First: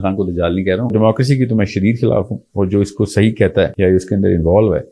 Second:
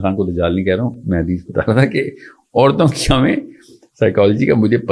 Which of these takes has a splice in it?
first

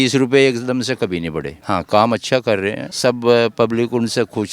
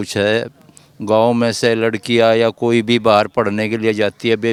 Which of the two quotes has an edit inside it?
first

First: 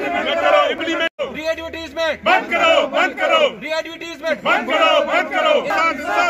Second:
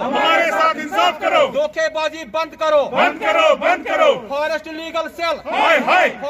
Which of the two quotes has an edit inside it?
first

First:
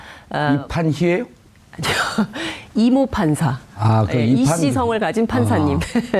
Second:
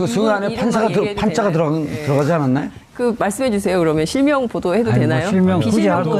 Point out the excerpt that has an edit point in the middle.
second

